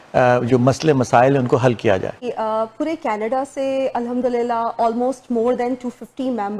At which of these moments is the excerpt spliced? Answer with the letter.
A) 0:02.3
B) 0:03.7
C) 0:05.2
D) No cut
A